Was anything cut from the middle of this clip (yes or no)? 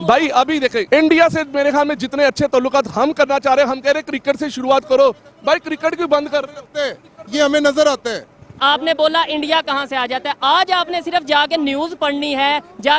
yes